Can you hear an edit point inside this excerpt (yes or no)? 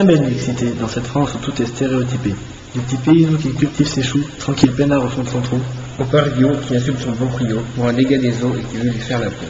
yes